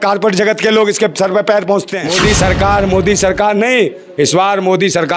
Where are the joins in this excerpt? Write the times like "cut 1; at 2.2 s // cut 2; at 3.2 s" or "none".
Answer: cut 1; at 2.0 s